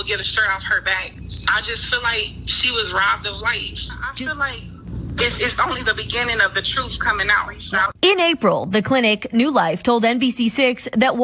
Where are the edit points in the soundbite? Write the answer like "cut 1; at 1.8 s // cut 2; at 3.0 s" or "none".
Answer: cut 1; at 4.0 s // cut 2; at 7.6 s